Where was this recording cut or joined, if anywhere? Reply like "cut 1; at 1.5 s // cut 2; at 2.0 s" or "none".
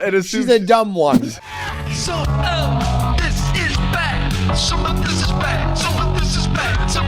cut 1; at 1.1 s